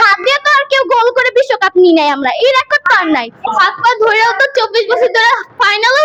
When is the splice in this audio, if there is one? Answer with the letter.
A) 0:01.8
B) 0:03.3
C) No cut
C